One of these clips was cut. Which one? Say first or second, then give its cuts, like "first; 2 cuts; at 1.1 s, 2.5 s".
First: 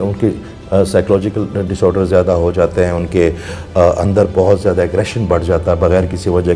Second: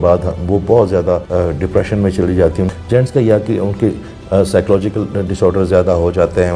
second; 2 cuts; at 1.2 s, 2.7 s